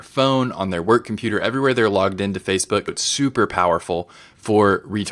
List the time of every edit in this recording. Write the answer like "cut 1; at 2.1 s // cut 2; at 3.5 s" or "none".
cut 1; at 2.9 s